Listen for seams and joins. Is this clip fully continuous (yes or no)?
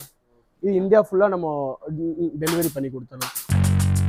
yes